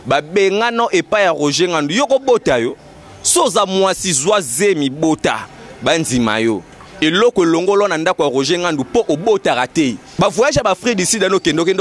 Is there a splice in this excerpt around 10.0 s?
yes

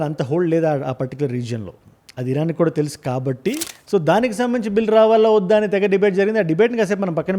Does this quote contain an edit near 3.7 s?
yes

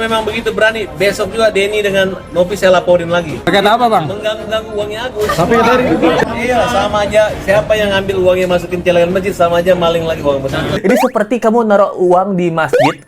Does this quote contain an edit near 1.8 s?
no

